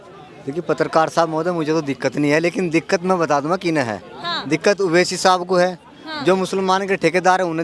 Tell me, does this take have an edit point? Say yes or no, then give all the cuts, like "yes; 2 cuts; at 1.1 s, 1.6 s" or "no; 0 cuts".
no; 0 cuts